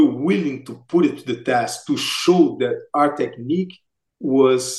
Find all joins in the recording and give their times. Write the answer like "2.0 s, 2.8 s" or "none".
none